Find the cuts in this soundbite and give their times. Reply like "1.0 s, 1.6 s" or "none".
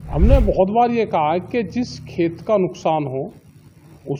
none